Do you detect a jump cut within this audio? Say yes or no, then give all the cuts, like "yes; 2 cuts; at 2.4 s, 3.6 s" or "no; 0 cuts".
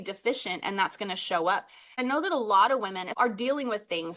yes; 2 cuts; at 2.0 s, 3.0 s